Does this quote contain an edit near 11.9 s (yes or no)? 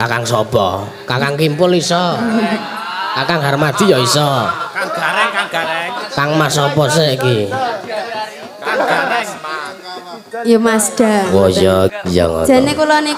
yes